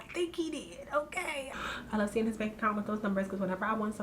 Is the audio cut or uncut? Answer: cut